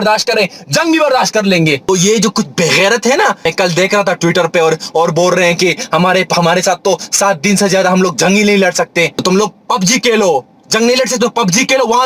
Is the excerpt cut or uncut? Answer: cut